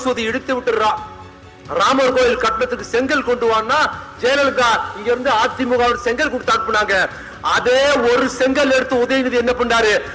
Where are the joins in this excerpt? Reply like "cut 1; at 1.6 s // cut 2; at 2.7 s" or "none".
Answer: none